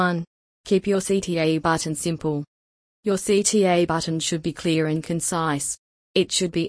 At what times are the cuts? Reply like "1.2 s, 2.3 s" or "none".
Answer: 1.0 s, 2.3 s